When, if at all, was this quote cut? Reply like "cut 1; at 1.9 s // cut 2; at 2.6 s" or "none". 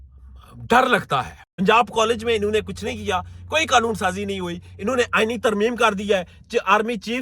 cut 1; at 1.4 s